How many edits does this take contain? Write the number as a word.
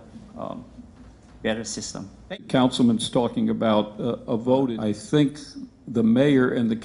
one